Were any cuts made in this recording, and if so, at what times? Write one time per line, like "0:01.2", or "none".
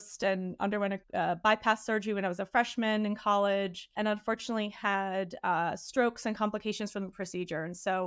0:01.0
0:03.9